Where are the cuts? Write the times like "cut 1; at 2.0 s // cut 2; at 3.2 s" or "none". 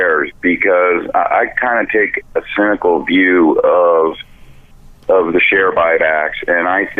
none